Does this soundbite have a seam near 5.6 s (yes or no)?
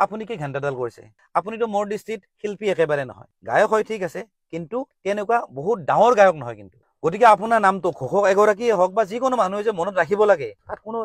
no